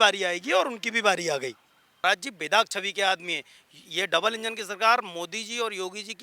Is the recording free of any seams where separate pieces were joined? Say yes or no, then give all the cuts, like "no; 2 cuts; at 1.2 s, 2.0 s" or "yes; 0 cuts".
no; 1 cut; at 2.0 s